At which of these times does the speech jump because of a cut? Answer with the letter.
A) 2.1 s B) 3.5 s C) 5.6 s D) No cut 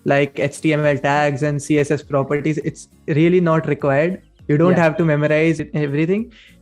C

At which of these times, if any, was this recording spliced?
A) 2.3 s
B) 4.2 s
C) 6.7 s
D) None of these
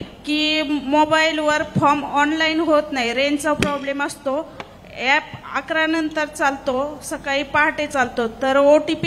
D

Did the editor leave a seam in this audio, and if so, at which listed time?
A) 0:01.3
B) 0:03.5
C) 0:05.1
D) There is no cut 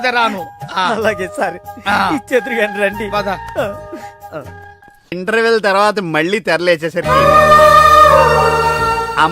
C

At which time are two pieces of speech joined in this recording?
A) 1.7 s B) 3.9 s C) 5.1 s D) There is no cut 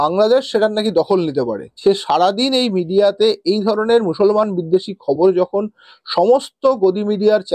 A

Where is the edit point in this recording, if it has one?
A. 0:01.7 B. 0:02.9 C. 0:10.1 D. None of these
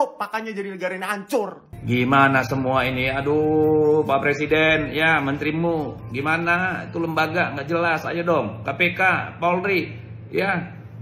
A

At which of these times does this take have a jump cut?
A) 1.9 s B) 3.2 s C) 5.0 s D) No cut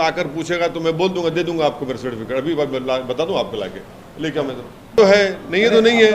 C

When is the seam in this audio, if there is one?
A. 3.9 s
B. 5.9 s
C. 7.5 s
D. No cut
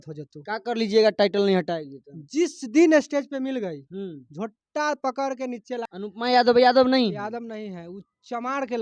B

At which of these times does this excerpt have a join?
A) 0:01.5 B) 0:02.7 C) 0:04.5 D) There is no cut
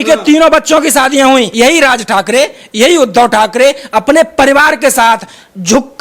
A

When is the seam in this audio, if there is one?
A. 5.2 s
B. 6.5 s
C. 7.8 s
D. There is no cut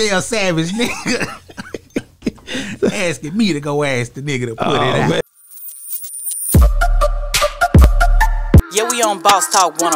A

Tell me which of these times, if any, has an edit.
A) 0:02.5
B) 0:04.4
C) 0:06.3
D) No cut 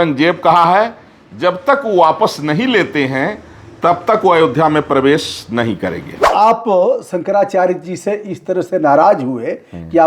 C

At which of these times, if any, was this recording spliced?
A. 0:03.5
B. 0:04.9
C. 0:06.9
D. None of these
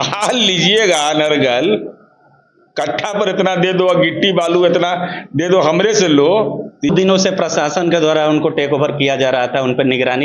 C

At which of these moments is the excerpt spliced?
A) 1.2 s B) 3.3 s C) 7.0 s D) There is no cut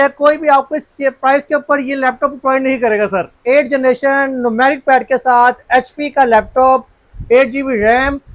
B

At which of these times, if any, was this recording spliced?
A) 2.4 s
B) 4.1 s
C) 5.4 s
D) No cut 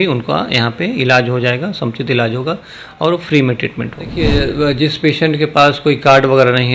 B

